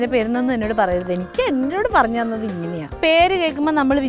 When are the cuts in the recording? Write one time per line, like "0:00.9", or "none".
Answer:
0:02.9